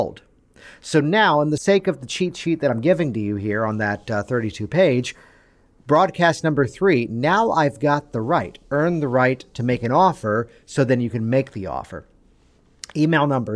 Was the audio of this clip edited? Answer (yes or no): yes